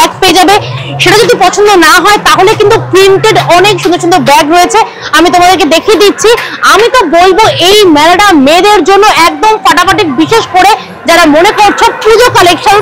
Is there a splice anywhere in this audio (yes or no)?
no